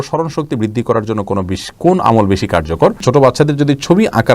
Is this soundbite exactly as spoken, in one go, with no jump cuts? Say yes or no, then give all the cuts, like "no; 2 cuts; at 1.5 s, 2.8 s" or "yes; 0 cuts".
no; 1 cut; at 3.0 s